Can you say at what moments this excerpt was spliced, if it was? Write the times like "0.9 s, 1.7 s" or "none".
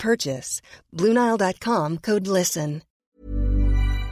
3.1 s